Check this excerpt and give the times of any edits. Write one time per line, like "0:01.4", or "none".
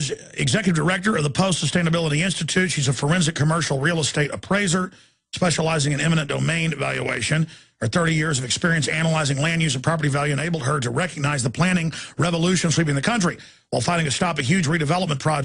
0:06.9

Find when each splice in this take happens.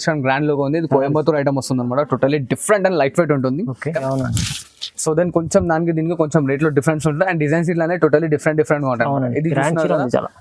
0:04.0

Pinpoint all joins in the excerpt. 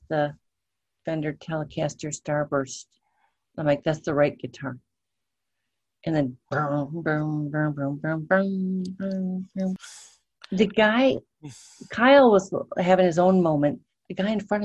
0:09.8

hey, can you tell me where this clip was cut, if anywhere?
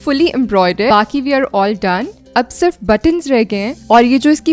0:00.9

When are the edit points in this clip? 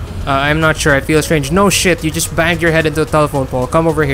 none

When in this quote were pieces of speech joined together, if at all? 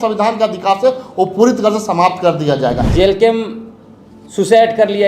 0:02.8

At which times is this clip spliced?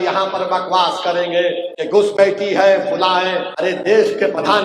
0:01.7
0:03.5

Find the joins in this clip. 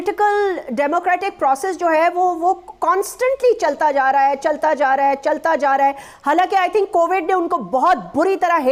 none

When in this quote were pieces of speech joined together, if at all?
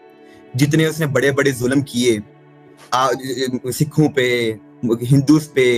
none

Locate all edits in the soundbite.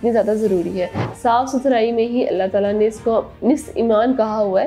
0:01.0

